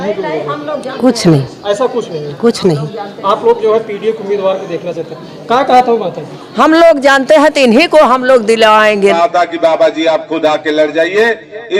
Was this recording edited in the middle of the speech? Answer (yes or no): yes